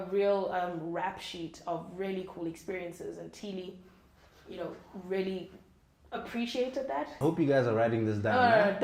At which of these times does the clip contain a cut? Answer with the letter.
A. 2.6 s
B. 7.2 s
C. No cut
B